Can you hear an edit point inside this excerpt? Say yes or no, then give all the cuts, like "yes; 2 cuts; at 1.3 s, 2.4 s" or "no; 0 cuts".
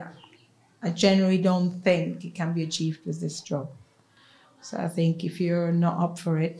no; 0 cuts